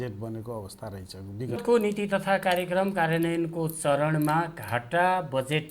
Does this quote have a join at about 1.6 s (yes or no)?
yes